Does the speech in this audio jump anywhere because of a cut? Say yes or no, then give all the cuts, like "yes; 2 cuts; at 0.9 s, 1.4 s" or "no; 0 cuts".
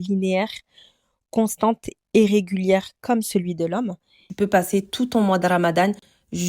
yes; 1 cut; at 4.2 s